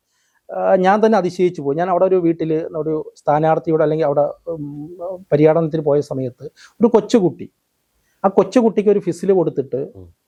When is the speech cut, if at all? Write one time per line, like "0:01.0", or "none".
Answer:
none